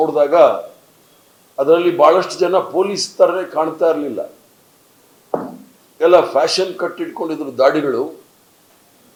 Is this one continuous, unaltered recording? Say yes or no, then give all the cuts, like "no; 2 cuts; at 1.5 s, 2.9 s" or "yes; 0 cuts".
yes; 0 cuts